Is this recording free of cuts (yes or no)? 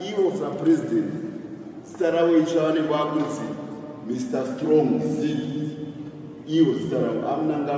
no